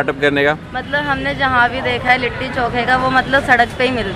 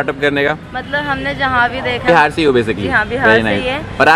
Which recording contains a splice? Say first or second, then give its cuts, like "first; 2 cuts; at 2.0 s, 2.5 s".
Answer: second; 1 cut; at 2.1 s